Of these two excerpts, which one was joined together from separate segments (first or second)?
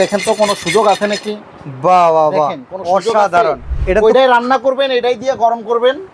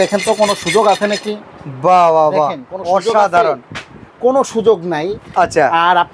first